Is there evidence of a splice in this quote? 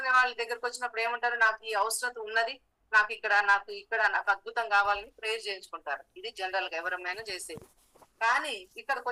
no; 0 cuts

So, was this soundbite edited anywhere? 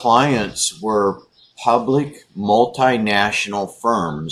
no; 0 cuts

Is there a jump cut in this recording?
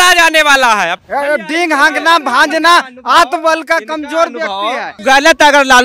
yes; 2 cuts; at 1.0 s, 4.9 s

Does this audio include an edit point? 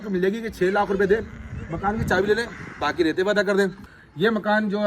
yes; 1 cut; at 3.9 s

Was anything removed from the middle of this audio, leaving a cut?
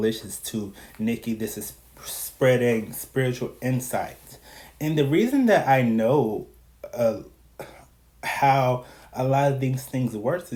no; 0 cuts

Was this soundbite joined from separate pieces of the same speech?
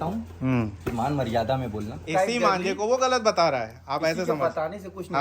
yes; 1 cut; at 2.0 s

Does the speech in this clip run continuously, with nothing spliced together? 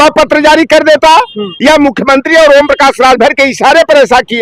yes; 0 cuts

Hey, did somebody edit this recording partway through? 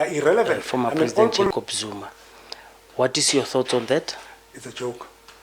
yes; 1 cut; at 1.4 s

